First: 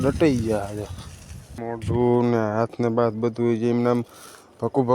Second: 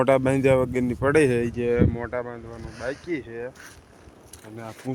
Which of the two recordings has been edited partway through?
first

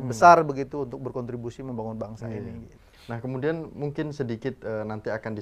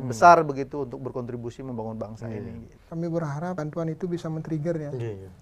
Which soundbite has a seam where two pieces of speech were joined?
second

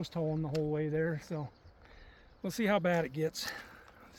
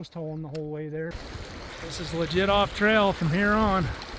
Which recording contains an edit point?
second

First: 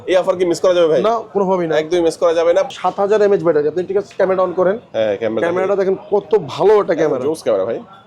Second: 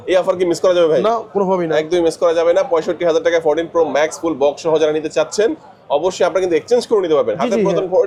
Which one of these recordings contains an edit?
first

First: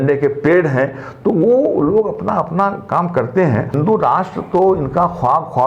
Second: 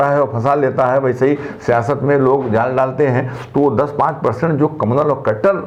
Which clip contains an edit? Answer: first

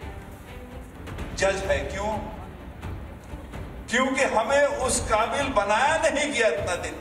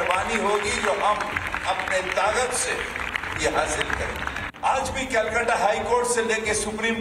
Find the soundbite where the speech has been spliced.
second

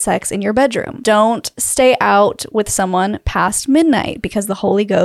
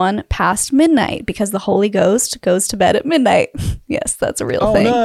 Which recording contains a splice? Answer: first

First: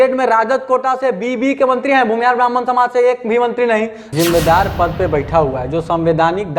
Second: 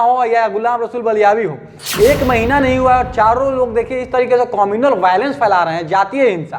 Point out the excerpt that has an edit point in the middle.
first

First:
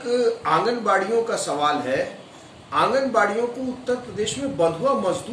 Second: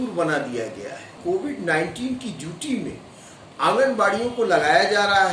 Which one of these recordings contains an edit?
second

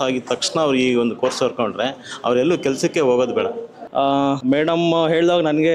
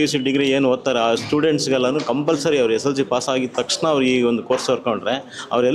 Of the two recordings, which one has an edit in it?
first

